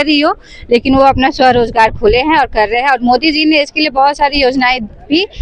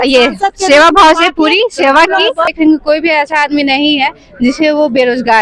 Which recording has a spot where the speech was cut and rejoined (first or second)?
second